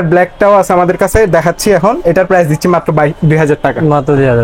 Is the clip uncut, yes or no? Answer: yes